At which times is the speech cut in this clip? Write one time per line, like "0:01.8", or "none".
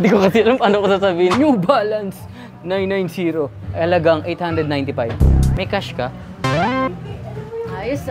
0:01.3
0:05.2

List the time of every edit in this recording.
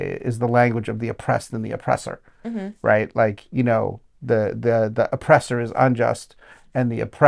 none

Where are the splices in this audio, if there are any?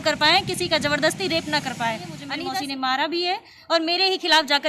0:02.2

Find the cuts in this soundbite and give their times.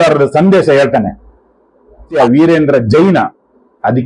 0:02.1

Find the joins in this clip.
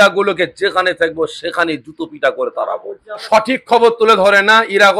none

